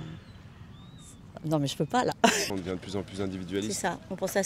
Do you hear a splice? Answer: yes; 1 cut; at 2.4 s

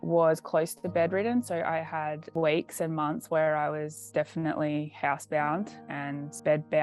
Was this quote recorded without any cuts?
yes; 0 cuts

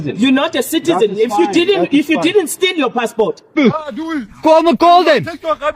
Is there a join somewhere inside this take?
yes; 1 cut; at 3.6 s

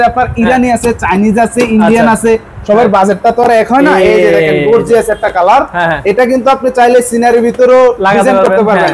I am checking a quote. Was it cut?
no; 0 cuts

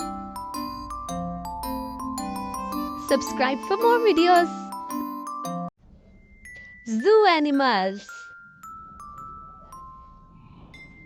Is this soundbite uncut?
yes; 0 cuts

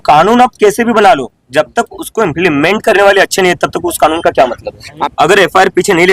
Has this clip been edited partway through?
yes; 1 cut; at 5.0 s

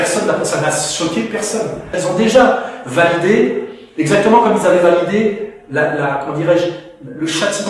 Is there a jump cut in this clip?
yes; 1 cut; at 1.9 s

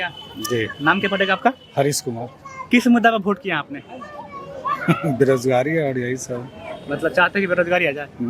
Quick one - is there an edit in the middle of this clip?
no; 0 cuts

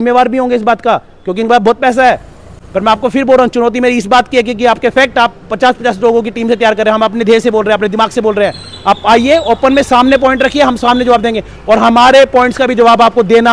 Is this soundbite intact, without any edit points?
yes; 0 cuts

